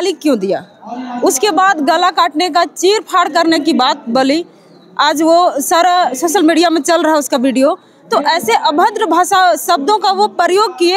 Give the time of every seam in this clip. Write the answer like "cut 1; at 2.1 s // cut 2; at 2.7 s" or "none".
none